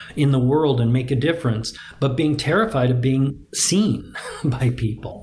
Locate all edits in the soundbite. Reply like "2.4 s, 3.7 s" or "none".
none

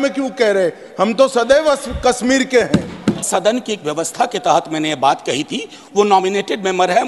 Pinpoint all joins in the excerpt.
3.3 s

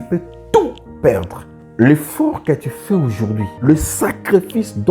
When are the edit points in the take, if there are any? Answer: 3.5 s

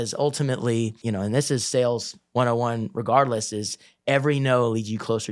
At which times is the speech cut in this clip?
1.0 s

